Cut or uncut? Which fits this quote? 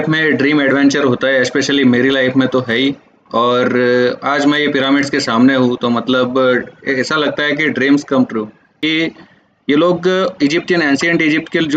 cut